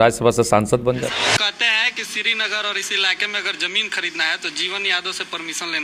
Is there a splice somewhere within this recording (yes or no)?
yes